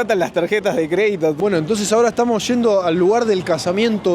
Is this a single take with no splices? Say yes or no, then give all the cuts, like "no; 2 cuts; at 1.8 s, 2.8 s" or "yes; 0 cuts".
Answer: no; 1 cut; at 1.4 s